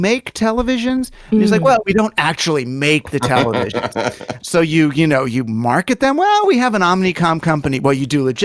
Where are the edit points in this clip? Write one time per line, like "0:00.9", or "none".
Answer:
0:04.3